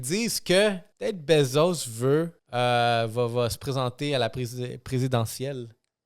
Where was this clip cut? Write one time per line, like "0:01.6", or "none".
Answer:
0:00.9
0:02.4

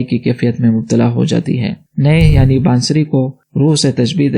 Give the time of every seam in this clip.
0:01.9

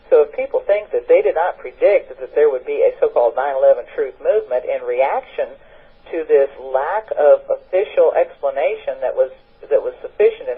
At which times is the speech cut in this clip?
none

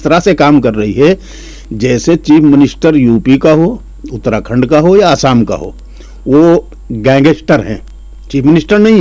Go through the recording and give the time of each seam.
none

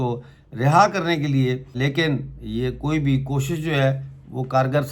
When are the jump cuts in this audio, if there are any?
0:01.7

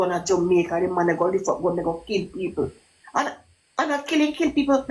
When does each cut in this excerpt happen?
none

